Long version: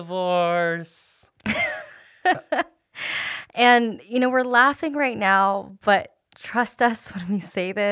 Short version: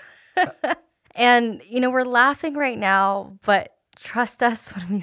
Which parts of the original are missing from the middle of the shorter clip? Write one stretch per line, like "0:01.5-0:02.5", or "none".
0:02.8-0:03.4